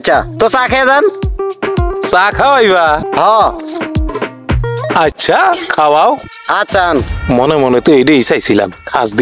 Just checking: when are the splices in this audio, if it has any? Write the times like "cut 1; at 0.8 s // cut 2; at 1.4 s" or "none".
none